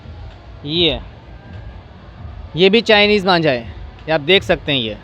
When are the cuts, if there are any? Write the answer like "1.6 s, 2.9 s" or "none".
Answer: none